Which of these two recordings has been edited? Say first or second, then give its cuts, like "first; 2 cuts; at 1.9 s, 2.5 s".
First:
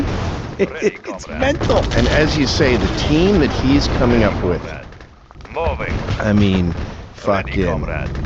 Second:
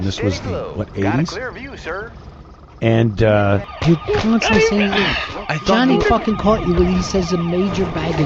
second; 1 cut; at 3.7 s